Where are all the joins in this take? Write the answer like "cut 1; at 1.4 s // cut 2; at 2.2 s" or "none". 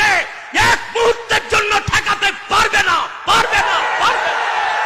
none